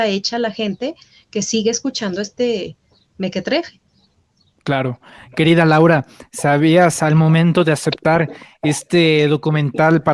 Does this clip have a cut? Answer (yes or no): no